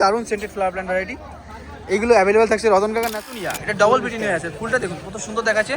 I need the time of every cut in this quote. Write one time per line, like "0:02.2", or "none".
0:03.2